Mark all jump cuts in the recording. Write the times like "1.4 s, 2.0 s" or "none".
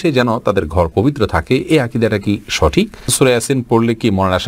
3.1 s